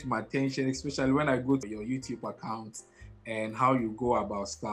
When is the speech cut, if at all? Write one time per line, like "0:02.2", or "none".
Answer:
0:01.6